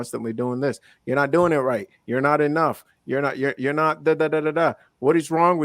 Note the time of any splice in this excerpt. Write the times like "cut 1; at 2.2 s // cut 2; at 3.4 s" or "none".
none